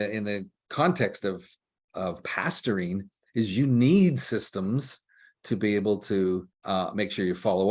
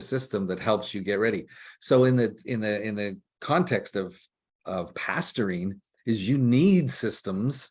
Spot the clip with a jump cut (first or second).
first